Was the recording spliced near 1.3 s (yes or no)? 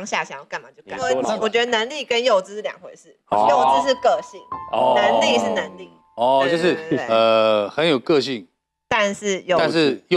yes